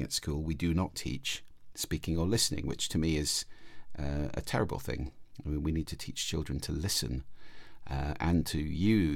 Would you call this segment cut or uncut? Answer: uncut